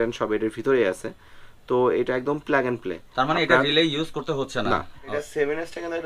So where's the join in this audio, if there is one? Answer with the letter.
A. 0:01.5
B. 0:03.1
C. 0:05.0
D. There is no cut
C